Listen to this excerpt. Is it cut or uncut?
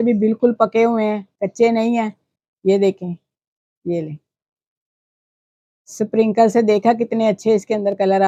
uncut